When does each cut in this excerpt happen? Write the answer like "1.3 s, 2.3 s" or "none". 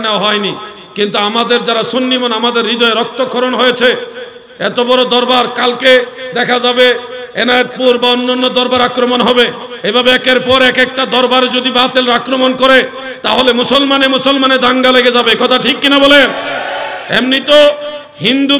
none